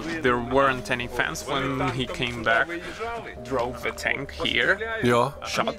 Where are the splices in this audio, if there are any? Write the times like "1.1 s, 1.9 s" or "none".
none